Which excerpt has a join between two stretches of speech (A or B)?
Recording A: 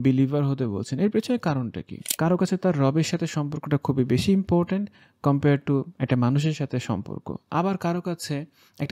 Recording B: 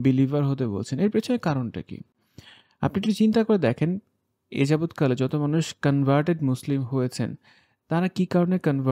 A